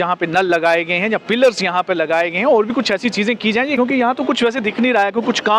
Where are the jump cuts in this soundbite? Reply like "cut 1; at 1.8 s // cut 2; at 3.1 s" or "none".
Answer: cut 1; at 3.8 s